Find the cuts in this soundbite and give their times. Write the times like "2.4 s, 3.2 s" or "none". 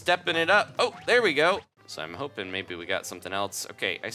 1.7 s